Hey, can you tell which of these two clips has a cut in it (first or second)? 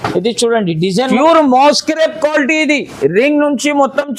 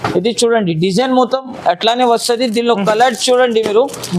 first